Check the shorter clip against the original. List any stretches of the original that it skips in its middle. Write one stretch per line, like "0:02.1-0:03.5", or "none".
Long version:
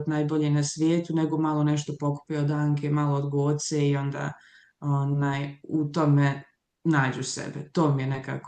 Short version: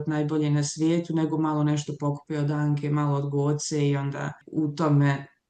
0:04.4-0:05.6